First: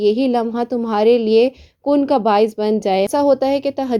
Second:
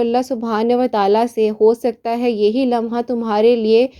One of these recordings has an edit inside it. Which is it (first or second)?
first